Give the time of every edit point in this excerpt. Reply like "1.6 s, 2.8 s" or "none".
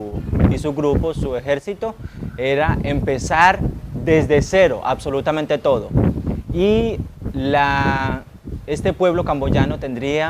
4.8 s